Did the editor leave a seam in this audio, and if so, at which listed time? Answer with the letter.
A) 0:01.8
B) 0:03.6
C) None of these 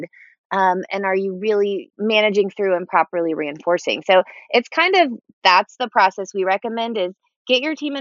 A